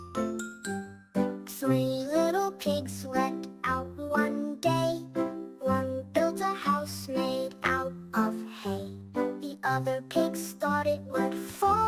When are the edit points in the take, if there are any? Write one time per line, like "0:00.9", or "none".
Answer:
0:01.4